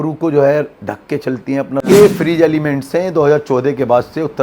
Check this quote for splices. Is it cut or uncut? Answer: cut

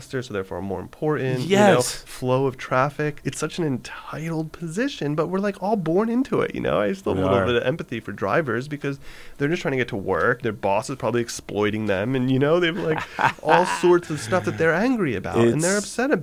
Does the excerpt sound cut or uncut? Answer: cut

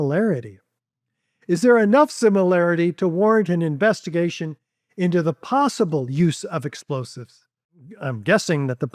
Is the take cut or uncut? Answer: cut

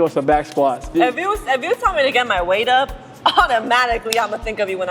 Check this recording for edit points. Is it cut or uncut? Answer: cut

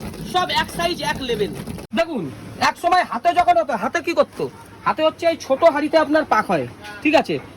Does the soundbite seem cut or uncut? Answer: cut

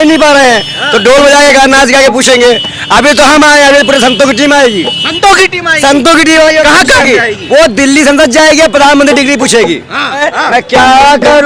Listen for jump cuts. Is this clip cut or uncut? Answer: cut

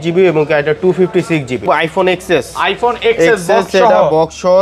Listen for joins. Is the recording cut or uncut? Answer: cut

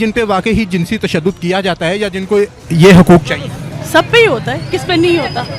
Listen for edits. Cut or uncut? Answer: uncut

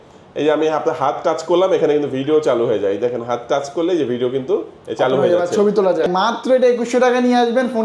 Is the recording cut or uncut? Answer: cut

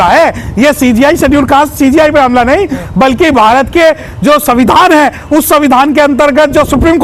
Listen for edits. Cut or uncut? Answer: uncut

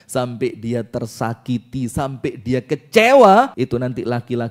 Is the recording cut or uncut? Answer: cut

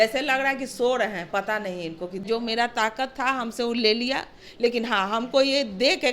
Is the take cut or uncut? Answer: cut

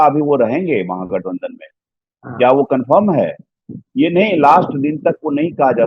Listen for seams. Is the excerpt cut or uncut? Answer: uncut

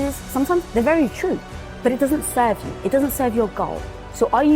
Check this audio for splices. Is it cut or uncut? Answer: cut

